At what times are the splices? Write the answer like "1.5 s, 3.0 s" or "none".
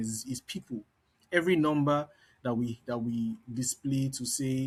none